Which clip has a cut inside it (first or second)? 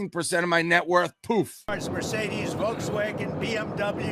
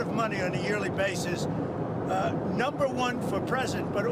first